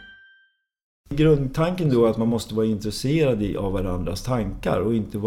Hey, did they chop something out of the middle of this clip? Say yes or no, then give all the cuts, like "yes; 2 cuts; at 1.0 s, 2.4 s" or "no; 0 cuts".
yes; 1 cut; at 0.9 s